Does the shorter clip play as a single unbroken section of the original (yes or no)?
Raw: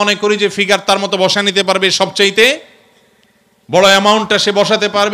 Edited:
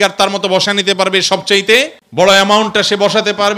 no